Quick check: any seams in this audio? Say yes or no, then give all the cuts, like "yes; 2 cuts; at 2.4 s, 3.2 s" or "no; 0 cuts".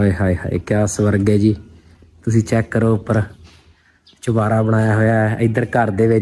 no; 0 cuts